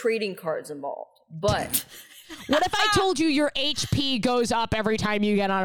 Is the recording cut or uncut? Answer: cut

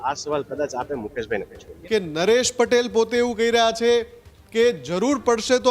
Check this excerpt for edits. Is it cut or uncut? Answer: cut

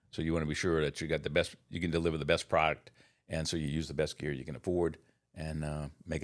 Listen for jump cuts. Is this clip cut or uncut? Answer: uncut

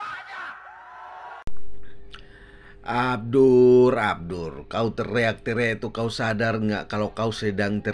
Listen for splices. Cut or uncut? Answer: uncut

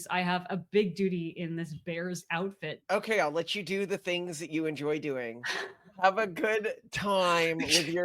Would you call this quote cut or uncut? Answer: cut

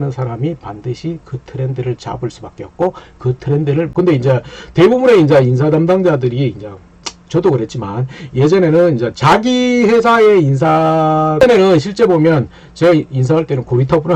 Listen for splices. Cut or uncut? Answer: cut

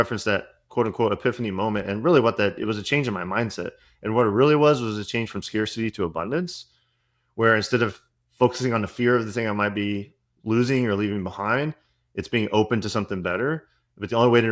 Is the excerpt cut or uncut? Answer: uncut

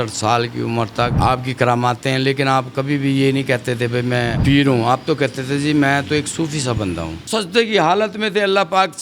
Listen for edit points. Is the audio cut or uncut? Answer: cut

